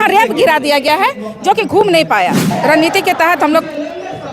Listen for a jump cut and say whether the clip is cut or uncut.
cut